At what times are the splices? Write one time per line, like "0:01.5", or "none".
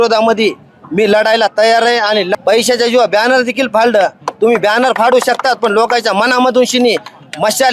0:02.3